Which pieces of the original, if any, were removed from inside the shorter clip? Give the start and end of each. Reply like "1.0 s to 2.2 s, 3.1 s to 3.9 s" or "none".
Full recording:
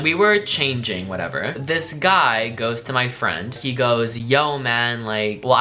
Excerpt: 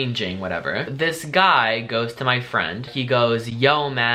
none